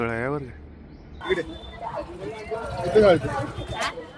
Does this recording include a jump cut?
yes; 1 cut; at 1.1 s

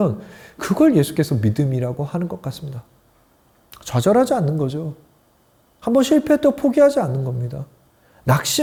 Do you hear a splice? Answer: no; 0 cuts

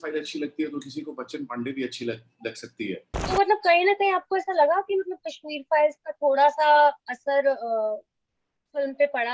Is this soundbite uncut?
no; 1 cut; at 3.1 s

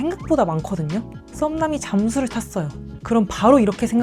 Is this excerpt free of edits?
yes; 0 cuts

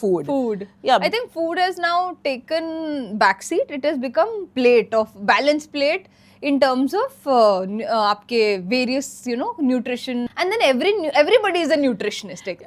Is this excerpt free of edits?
no; 1 cut; at 10.3 s

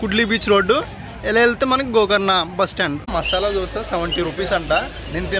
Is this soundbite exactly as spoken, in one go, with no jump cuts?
no; 1 cut; at 3.1 s

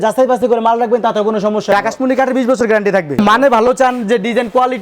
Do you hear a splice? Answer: yes; 2 cuts; at 1.7 s, 3.2 s

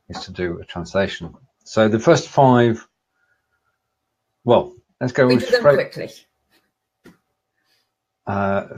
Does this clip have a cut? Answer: yes; 1 cut; at 3.5 s

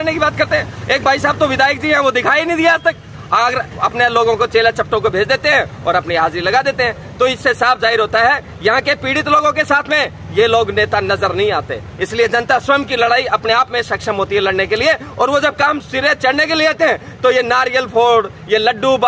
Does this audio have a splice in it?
no; 0 cuts

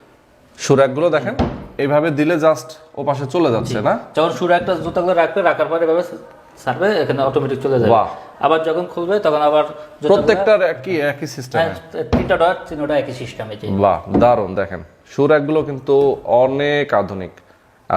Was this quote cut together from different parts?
no; 0 cuts

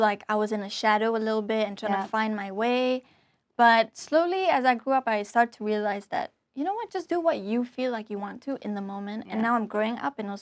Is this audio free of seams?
no; 1 cut; at 9.2 s

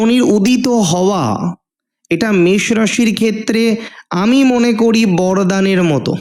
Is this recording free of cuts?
yes; 0 cuts

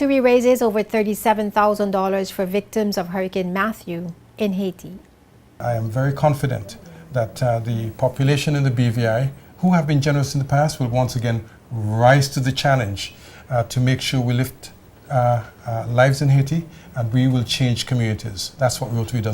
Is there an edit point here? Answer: yes; 1 cut; at 5.6 s

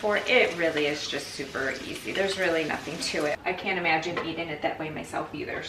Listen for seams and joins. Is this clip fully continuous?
no; 1 cut; at 3.4 s

